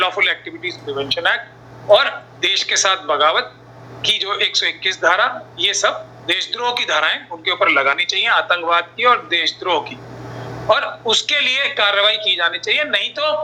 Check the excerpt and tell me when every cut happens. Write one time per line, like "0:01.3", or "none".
none